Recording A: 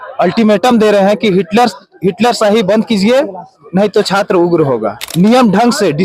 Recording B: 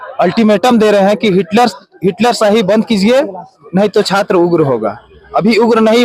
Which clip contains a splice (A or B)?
A